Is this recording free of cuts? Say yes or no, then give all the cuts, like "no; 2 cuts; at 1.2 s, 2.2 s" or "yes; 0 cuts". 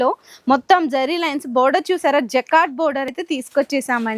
no; 1 cut; at 3.2 s